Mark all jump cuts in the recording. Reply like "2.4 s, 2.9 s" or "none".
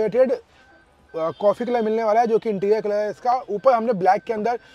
none